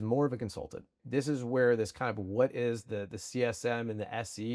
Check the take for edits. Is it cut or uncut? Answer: cut